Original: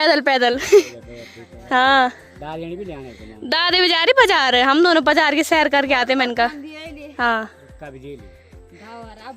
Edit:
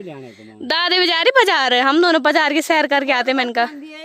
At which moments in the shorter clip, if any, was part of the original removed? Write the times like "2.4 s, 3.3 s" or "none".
none